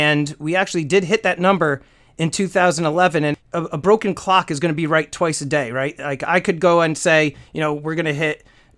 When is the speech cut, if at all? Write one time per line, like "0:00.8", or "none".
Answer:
0:03.3